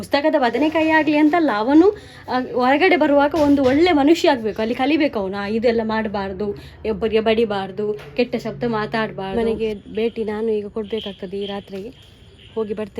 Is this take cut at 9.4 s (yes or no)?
yes